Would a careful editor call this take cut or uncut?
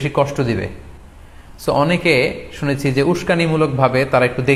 uncut